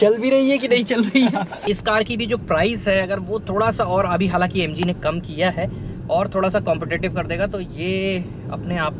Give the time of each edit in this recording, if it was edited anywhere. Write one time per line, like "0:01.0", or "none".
0:01.5